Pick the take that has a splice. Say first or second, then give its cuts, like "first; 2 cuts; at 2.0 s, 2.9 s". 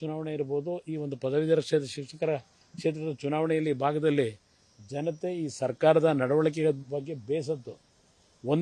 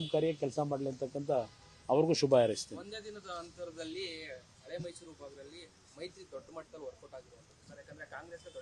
second; 1 cut; at 2.9 s